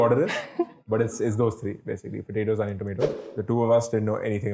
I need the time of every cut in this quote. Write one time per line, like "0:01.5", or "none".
0:03.3